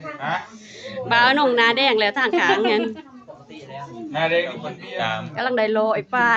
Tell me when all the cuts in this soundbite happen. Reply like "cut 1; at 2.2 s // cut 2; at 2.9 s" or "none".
cut 1; at 4.7 s